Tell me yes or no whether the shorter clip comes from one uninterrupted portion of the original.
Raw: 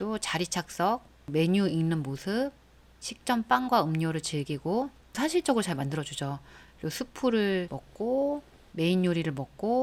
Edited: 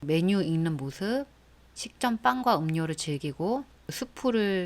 no